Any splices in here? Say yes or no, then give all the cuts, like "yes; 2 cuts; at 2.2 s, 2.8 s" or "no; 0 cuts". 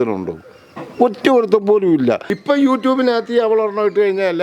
yes; 1 cut; at 2.3 s